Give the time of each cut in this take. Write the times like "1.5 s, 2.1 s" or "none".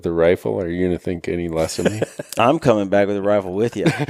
none